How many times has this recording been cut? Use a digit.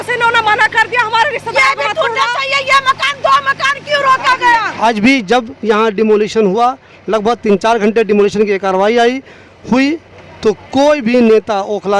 1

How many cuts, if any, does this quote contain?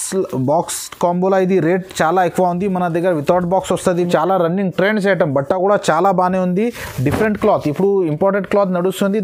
1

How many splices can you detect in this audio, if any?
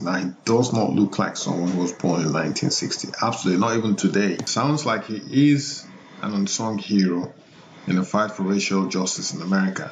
1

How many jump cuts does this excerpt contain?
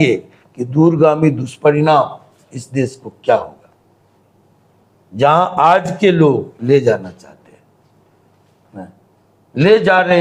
0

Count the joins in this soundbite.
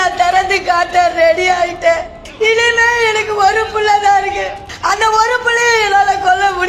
2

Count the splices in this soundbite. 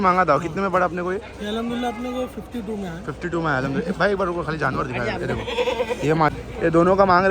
1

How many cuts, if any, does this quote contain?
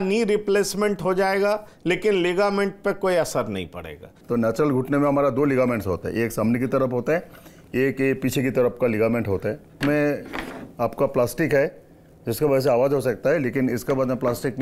2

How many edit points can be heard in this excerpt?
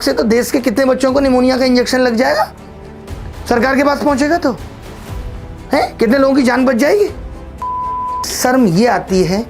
0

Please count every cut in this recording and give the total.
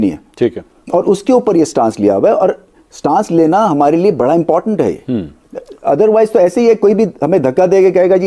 0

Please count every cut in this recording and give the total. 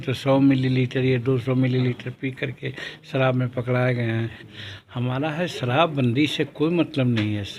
1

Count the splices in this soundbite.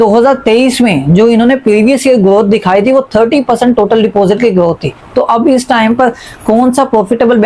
1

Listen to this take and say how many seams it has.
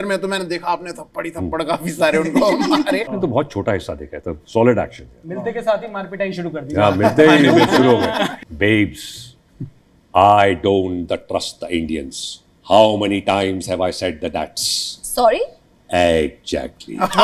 2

